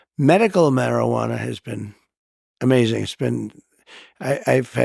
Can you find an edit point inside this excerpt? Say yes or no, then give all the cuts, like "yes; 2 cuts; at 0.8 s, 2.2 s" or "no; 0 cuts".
no; 0 cuts